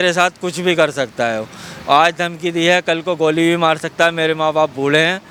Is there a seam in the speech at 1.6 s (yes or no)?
no